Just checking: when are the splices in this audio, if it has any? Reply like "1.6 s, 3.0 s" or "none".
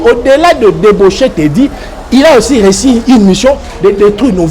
none